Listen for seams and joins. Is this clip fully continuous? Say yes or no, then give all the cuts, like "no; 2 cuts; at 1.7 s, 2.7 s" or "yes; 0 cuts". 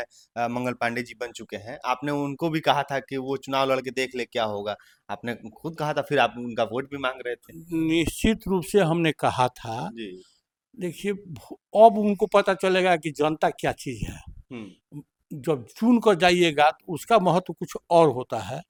yes; 0 cuts